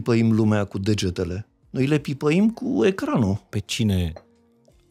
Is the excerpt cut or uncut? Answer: cut